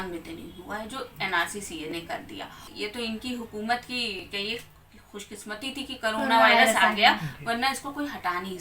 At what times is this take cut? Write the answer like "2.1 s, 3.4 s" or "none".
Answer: 2.7 s